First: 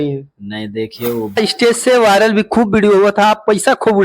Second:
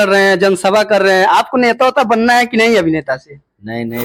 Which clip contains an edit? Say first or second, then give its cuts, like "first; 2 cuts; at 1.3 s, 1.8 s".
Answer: first; 1 cut; at 1.4 s